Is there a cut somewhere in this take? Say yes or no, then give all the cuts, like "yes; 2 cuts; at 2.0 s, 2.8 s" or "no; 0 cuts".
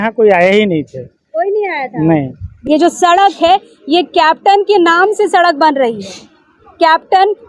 yes; 1 cut; at 2.6 s